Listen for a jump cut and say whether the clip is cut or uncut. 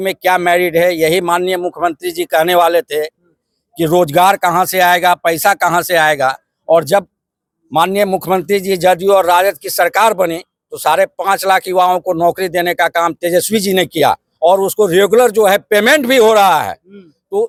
uncut